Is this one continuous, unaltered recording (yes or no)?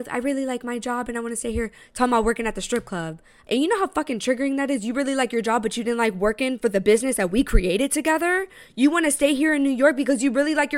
no